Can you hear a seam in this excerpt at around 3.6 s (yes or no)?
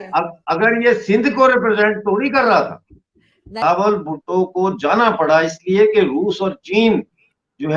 yes